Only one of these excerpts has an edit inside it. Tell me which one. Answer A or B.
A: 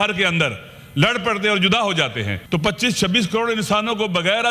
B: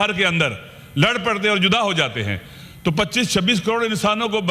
A